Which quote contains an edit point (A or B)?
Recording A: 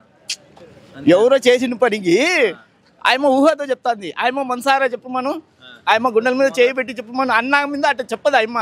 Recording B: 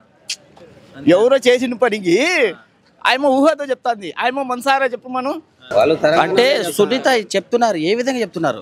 B